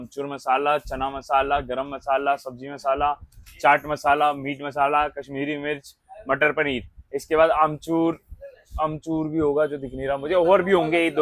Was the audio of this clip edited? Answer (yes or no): no